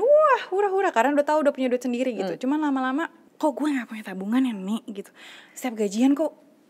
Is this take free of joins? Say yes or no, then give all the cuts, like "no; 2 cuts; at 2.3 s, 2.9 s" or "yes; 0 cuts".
no; 1 cut; at 3.2 s